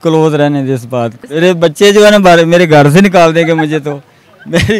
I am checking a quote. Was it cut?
yes; 1 cut; at 1.3 s

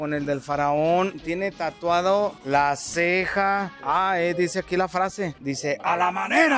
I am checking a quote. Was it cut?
yes; 1 cut; at 3.8 s

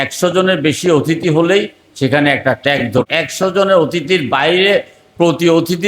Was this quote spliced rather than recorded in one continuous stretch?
yes; 1 cut; at 3.1 s

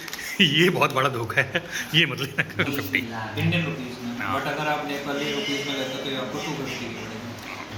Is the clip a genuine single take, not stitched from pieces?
yes; 0 cuts

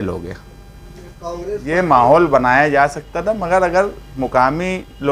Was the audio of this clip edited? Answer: yes; 1 cut; at 1.6 s

